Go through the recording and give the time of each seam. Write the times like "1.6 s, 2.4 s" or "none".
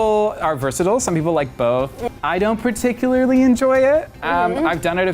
1.9 s